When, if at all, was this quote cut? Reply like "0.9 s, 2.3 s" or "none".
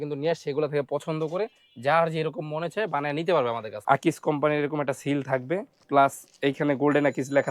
3.7 s, 5.8 s